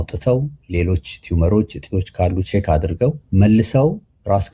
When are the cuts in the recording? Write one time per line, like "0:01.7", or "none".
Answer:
0:03.2